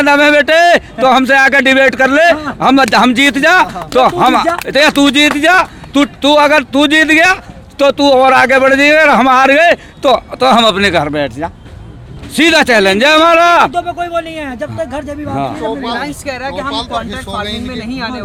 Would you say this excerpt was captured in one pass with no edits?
yes; 0 cuts

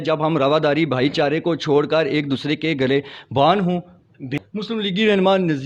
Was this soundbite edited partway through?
yes; 1 cut; at 4.3 s

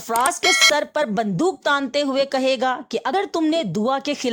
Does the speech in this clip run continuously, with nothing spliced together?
yes; 0 cuts

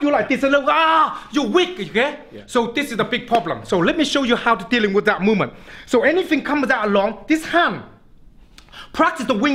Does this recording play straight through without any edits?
yes; 0 cuts

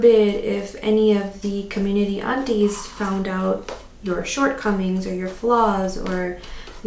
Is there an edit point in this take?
no; 0 cuts

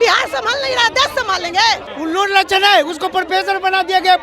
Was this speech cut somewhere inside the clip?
yes; 1 cut; at 1.9 s

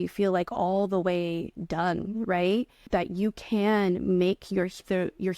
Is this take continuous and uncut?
no; 1 cut; at 2.8 s

